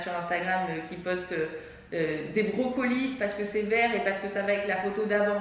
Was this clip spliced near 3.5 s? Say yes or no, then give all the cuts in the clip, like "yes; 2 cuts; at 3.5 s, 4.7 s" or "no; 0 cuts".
no; 0 cuts